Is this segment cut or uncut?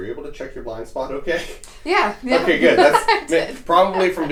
uncut